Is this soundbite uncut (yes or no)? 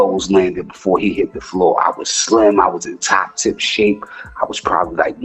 yes